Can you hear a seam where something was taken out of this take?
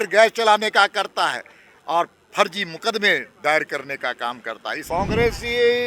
yes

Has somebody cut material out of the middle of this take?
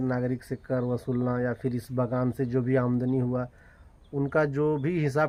no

